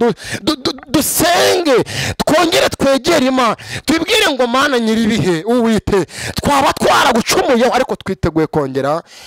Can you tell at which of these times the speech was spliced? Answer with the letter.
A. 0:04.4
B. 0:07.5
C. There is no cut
C